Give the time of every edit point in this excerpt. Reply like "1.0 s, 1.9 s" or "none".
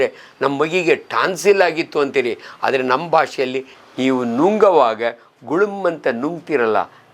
3.8 s